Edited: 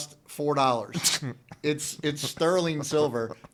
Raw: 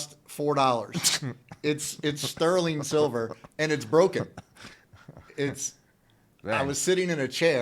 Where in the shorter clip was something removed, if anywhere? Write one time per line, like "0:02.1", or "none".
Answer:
none